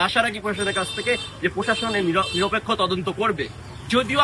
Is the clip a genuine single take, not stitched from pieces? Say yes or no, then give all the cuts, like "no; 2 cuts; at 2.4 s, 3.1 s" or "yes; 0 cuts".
yes; 0 cuts